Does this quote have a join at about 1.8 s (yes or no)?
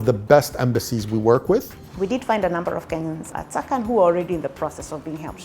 yes